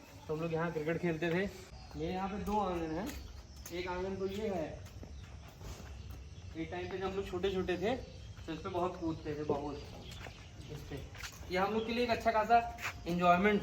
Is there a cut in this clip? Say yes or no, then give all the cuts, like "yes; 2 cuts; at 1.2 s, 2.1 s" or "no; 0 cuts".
yes; 1 cut; at 1.7 s